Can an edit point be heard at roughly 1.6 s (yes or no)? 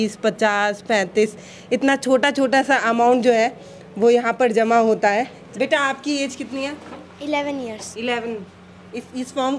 no